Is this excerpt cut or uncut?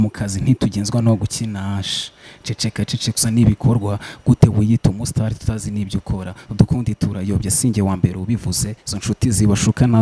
uncut